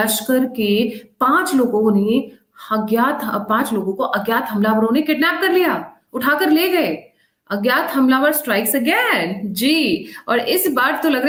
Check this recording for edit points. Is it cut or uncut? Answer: uncut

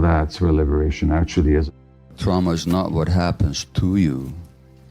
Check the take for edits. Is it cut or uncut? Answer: cut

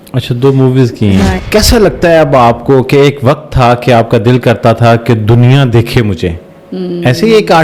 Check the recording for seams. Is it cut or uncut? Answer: cut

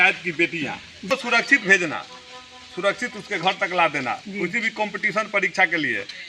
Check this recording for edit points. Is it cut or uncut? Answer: cut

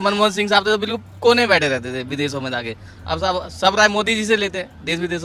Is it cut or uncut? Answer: uncut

